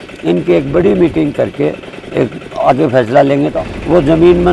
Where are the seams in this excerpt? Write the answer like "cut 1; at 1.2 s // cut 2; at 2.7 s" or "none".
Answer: cut 1; at 3.5 s